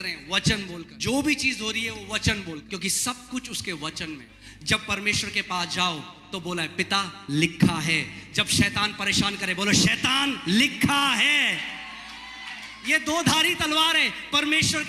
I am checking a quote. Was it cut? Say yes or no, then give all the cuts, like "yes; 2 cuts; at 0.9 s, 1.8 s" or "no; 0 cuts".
yes; 3 cuts; at 0.9 s, 2.6 s, 4.3 s